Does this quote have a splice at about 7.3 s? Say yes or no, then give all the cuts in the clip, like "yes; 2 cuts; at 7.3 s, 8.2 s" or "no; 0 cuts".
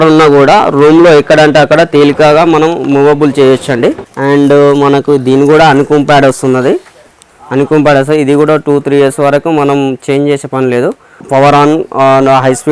no; 2 cuts; at 4.1 s, 11.2 s